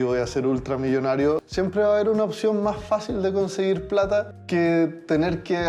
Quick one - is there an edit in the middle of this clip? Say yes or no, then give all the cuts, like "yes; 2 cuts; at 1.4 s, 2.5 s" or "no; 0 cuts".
yes; 2 cuts; at 1.4 s, 4.4 s